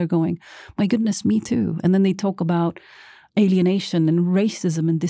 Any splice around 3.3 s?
yes; 1 cut; at 3.3 s

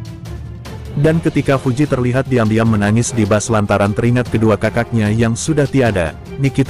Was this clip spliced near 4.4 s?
no; 1 cut; at 0.9 s

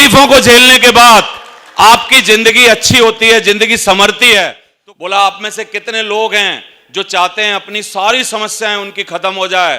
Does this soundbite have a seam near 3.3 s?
no; 1 cut; at 4.6 s

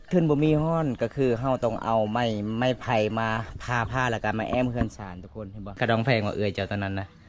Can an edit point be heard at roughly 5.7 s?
yes; 1 cut; at 5.7 s

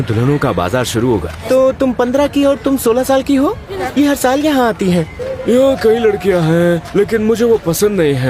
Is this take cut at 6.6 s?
no; 3 cuts; at 1.4 s, 3.7 s, 5.2 s

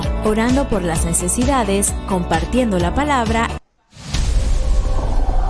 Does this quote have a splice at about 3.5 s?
yes; 1 cut; at 3.5 s

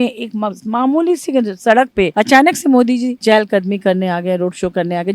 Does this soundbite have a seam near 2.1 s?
yes; 2 cuts; at 2.1 s, 3.1 s

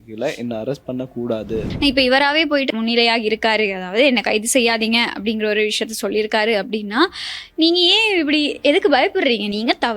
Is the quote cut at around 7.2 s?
no; 2 cuts; at 1.7 s, 2.7 s

